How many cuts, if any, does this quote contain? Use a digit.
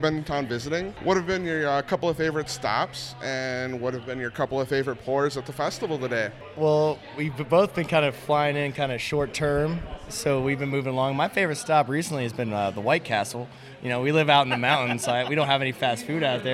1